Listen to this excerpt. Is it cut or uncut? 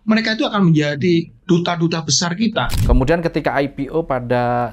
cut